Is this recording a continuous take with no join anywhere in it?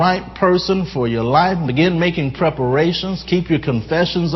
yes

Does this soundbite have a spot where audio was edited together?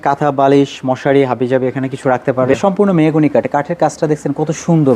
yes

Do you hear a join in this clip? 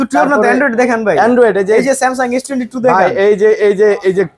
no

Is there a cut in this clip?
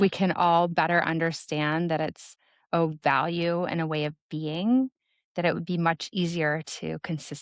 no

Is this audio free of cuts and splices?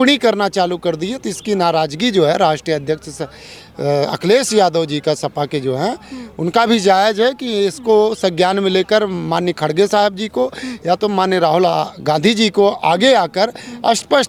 yes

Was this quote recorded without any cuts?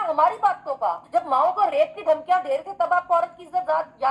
no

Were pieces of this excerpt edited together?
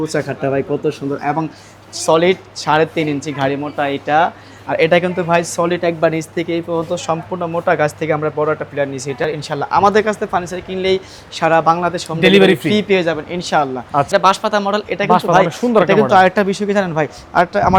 yes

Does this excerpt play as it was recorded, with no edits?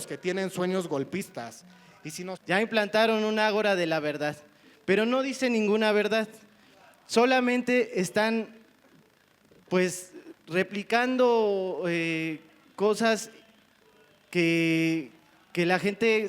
no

